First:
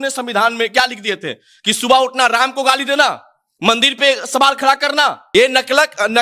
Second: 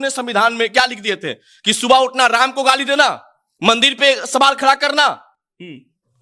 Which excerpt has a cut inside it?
first; 1 cut; at 5.2 s

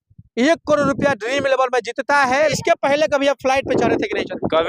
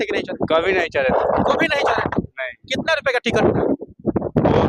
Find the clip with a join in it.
first; 1 cut; at 2.5 s

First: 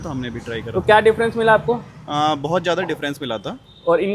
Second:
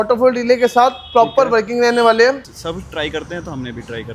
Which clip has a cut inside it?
second; 1 cut; at 2.5 s

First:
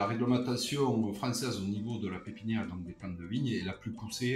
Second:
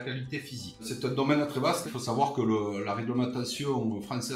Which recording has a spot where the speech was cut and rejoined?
second; 2 cuts; at 0.9 s, 1.9 s

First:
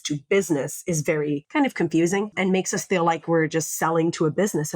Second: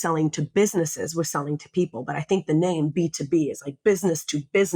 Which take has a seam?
first; 2 cuts; at 1.5 s, 2.3 s

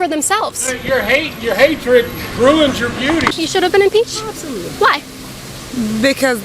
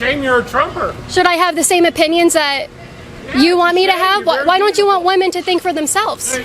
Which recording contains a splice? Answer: first; 1 cut; at 3.3 s

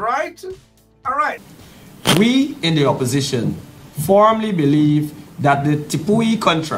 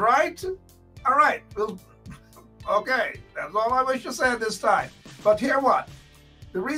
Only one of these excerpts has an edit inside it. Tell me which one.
first; 1 cut; at 1.5 s

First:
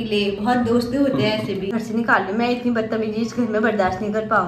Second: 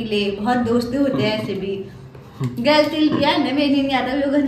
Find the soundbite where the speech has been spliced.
first; 1 cut; at 1.7 s

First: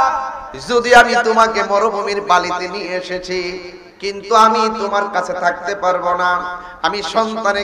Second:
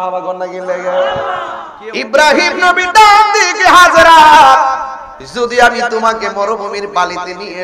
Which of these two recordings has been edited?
second; 1 cut; at 1.6 s

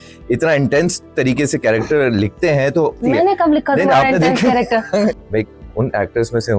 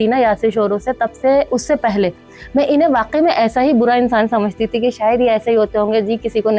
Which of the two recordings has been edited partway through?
first; 2 cuts; at 3.0 s, 5.1 s

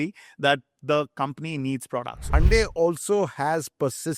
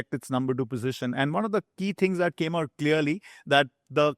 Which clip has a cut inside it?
first; 1 cut; at 2.3 s

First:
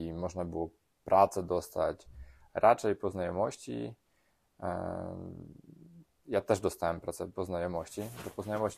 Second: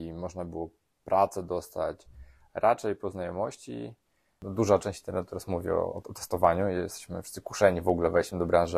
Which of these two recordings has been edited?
second; 1 cut; at 4.3 s

